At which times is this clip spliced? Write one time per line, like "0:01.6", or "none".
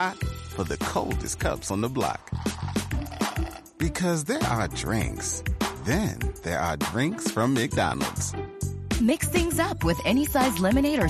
none